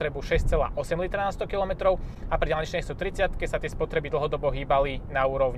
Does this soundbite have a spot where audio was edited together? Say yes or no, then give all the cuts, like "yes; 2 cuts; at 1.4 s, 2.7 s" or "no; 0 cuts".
no; 0 cuts